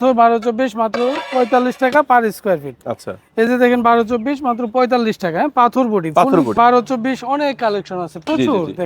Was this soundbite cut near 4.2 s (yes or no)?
no